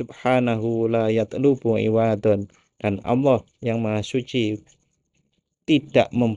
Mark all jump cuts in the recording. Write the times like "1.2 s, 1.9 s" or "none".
none